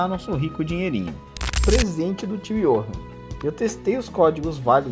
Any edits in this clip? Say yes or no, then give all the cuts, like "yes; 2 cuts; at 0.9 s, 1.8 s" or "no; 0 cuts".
yes; 1 cut; at 1.6 s